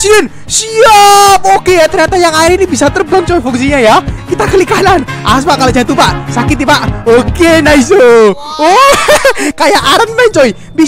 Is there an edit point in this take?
no; 0 cuts

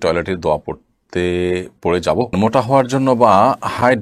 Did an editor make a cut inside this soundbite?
yes; 1 cut; at 2.3 s

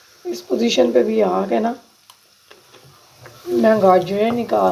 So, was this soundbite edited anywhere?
no; 0 cuts

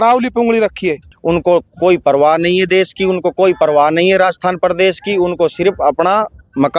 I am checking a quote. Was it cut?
yes; 1 cut; at 1.1 s

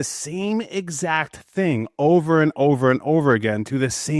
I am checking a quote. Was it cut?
no; 0 cuts

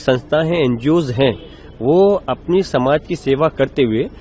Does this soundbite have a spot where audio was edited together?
no; 0 cuts

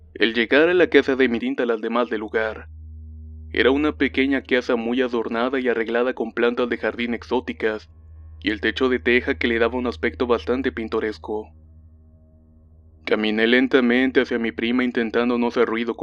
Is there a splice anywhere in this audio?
no; 0 cuts

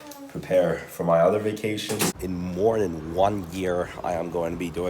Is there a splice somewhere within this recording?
yes; 1 cut; at 2.2 s

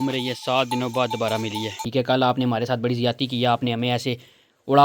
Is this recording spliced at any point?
yes; 1 cut; at 1.8 s

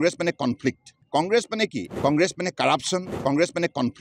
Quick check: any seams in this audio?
yes; 3 cuts; at 1.0 s, 1.9 s, 3.1 s

